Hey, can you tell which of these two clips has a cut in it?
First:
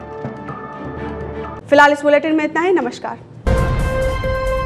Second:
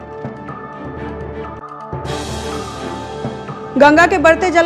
second; 2 cuts; at 1.6 s, 3.4 s

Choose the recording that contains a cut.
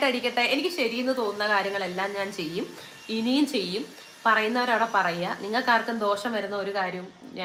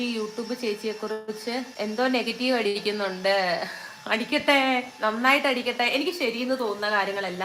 second; 1 cut; at 1.7 s

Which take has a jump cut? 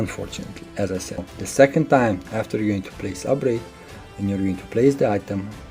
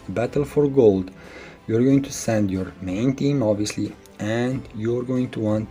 first; 1 cut; at 1.3 s

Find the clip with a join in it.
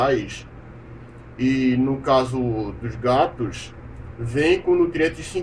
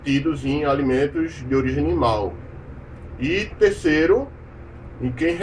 second; 1 cut; at 2.1 s

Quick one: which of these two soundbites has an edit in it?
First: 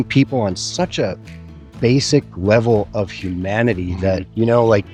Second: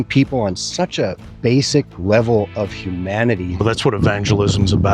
second; 2 cuts; at 1.2 s, 3.5 s

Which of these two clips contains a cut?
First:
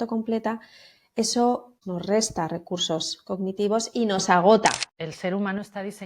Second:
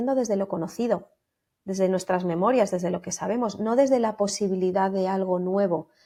first; 2 cuts; at 1.7 s, 4.8 s

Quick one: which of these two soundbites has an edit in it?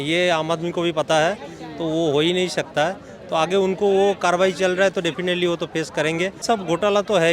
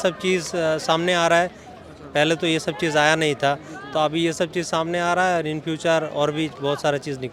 first; 1 cut; at 6.4 s

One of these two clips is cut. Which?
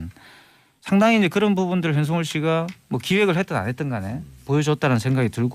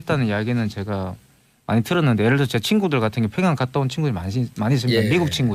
first; 1 cut; at 2.7 s

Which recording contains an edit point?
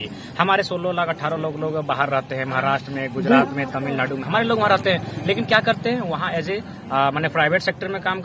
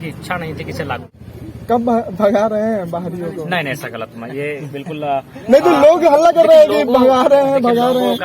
second; 1 cut; at 1.1 s

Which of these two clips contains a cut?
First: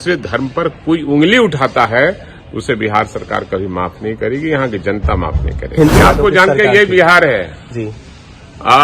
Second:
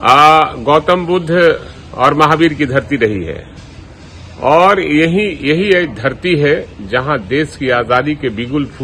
first; 1 cut; at 6.0 s

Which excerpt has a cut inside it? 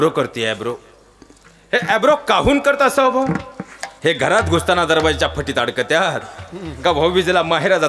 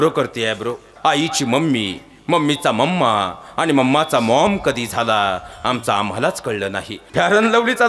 second; 2 cuts; at 0.9 s, 6.9 s

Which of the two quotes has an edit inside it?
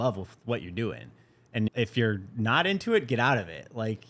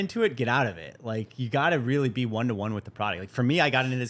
first; 1 cut; at 1.7 s

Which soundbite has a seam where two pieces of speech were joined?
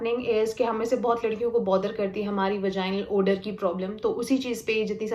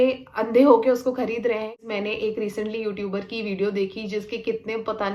second; 1 cut; at 1.8 s

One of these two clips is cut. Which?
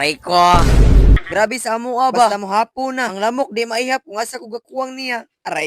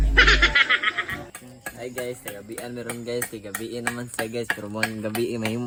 first; 1 cut; at 1.2 s

